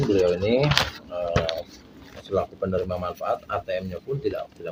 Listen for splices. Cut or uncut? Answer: uncut